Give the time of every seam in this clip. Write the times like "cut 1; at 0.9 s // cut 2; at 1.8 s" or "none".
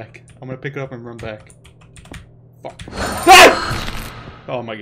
none